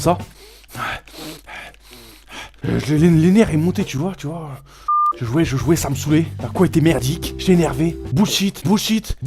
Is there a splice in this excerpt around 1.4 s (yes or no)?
yes